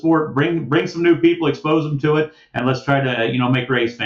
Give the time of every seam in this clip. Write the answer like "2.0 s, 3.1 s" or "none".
none